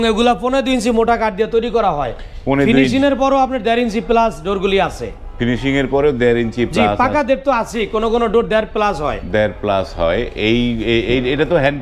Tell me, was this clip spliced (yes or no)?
no